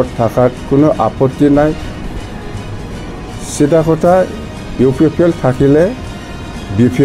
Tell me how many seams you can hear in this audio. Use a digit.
1